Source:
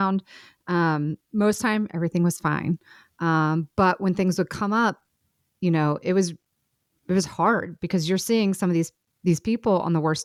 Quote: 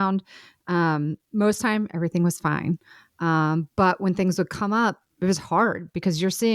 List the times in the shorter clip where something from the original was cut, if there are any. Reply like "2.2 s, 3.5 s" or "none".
5.1 s